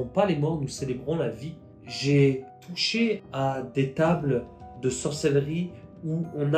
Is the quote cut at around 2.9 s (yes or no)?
yes